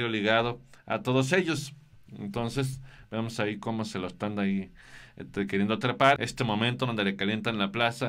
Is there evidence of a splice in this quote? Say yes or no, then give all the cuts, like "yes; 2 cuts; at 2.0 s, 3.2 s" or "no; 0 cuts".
yes; 1 cut; at 6.2 s